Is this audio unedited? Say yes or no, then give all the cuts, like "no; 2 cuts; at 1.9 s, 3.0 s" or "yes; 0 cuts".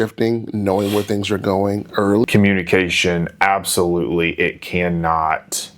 no; 1 cut; at 2.2 s